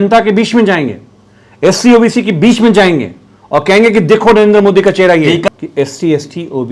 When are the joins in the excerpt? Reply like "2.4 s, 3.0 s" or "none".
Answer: 5.5 s